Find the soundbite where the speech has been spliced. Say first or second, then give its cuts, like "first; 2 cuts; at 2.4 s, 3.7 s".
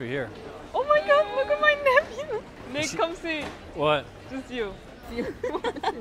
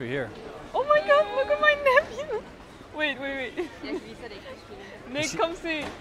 first; 2 cuts; at 2.6 s, 5.1 s